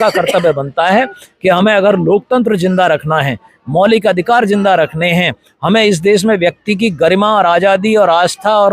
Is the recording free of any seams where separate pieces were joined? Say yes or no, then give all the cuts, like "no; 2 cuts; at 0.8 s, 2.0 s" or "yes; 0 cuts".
yes; 0 cuts